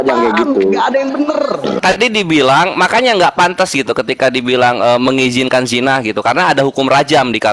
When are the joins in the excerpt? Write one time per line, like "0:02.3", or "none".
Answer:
0:01.8